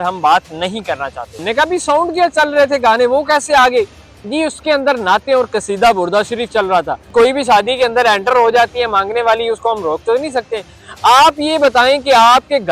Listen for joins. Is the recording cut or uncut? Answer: cut